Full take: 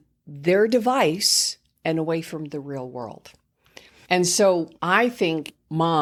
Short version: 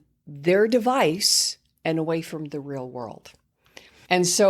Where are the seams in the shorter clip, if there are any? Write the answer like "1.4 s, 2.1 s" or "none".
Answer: none